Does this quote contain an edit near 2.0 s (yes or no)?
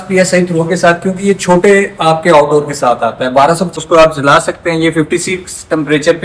no